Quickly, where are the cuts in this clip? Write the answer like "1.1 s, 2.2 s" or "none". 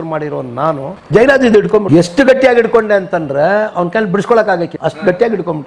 0.9 s, 1.9 s, 4.7 s

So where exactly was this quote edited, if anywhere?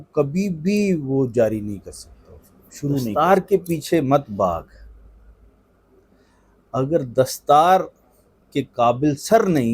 3.1 s

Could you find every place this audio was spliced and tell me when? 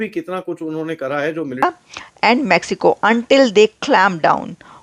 1.6 s

